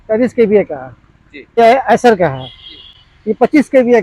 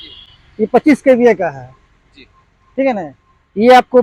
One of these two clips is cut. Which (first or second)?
first